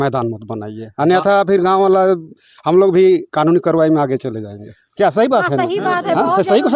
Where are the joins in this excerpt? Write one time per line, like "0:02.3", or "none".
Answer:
none